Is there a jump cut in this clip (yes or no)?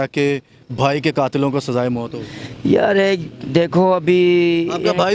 no